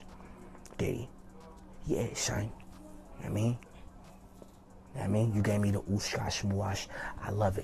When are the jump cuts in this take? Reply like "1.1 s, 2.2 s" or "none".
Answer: none